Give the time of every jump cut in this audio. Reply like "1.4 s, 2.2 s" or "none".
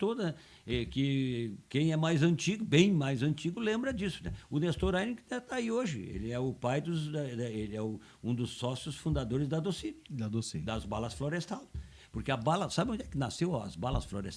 none